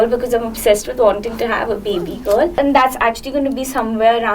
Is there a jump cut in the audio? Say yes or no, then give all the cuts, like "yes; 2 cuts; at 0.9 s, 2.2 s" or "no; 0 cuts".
yes; 1 cut; at 2.5 s